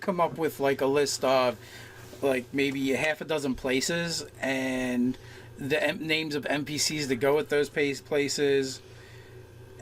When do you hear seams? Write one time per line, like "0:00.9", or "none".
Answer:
0:07.2